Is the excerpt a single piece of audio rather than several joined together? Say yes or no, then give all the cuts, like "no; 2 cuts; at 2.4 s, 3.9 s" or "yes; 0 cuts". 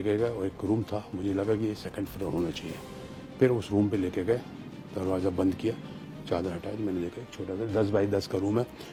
yes; 0 cuts